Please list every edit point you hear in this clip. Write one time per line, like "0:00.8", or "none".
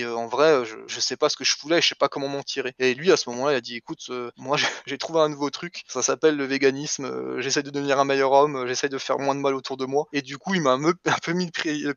none